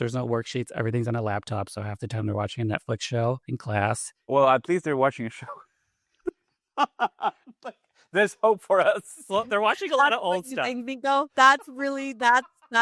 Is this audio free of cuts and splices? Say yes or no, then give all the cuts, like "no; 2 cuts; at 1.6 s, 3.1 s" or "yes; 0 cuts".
yes; 0 cuts